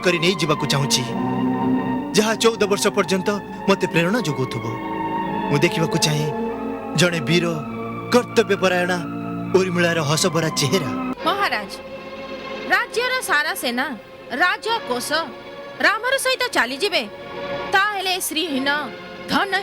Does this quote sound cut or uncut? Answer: cut